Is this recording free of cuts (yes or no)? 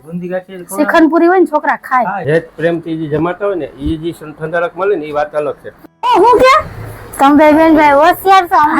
no